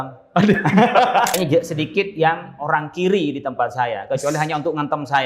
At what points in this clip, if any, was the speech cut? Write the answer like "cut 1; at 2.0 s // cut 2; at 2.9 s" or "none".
cut 1; at 1.3 s

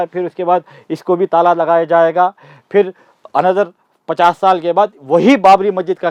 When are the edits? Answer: none

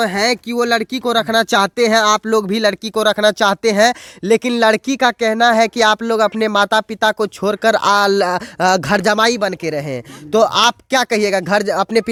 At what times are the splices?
none

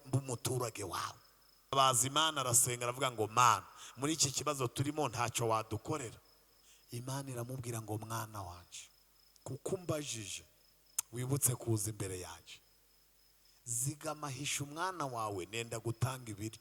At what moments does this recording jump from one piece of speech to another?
cut 1; at 1.7 s

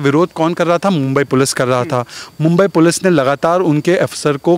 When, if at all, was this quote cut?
none

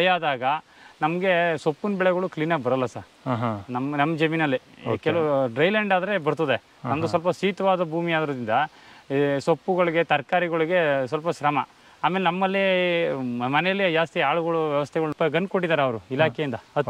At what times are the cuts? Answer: cut 1; at 15.1 s

